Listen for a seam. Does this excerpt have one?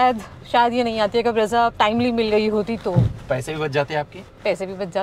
no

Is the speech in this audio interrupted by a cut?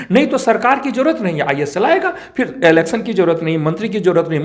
no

